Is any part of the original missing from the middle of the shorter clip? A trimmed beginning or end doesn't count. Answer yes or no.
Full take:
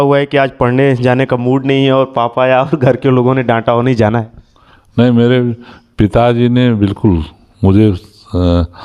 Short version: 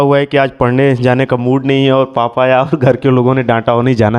no